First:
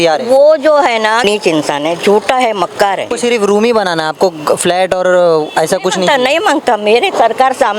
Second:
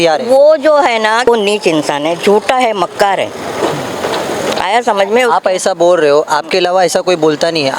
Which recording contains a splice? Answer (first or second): first